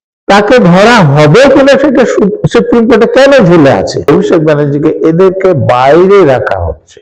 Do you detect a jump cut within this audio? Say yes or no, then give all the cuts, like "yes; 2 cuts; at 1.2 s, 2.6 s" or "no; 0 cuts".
yes; 1 cut; at 4.1 s